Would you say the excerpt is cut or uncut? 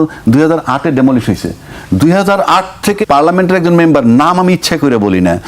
cut